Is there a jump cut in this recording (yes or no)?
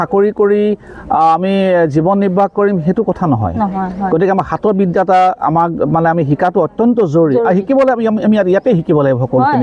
no